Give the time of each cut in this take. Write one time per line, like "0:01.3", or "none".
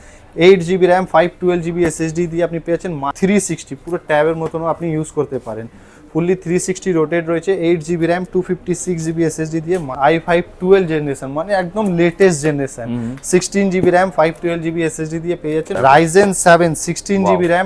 0:03.1
0:09.9
0:15.7

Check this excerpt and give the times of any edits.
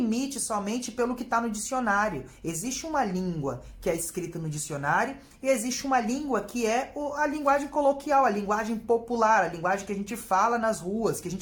none

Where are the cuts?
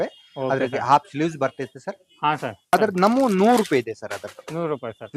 0:02.7

